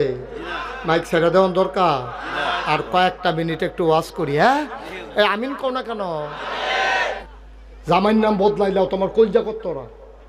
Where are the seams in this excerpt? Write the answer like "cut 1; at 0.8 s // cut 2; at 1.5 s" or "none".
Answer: cut 1; at 7.2 s